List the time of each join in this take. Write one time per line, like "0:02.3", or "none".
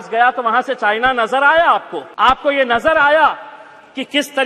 0:02.0